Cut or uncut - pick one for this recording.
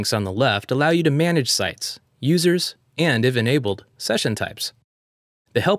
cut